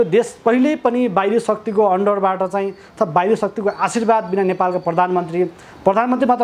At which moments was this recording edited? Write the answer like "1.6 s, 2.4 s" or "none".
none